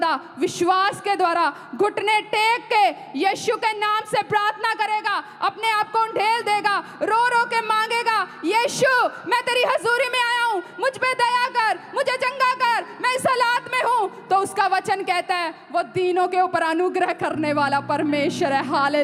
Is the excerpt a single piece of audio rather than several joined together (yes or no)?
yes